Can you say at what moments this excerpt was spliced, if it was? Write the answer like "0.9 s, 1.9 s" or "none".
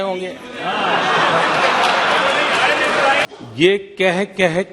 3.2 s